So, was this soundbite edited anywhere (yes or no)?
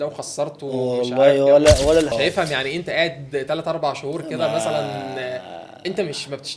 yes